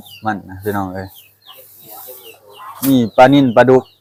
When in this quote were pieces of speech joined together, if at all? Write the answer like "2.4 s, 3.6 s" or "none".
none